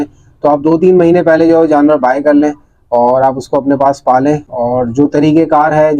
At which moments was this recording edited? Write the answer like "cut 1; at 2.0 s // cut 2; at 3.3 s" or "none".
none